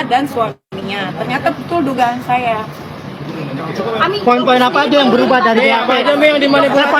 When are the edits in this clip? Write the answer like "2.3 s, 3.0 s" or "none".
none